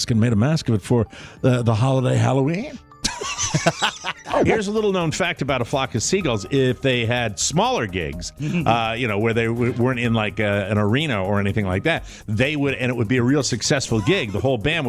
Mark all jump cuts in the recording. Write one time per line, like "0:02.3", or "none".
0:04.4